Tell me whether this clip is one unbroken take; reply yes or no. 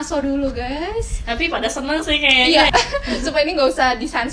no